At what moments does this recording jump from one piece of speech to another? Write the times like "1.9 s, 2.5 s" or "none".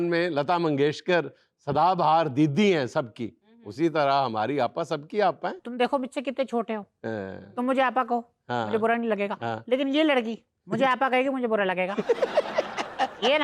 5.6 s